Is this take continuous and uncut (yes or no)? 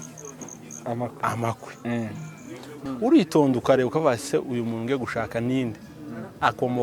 no